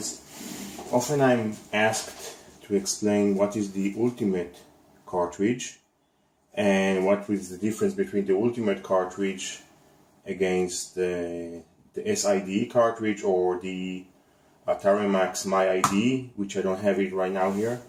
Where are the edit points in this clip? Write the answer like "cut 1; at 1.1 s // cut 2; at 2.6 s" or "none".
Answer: none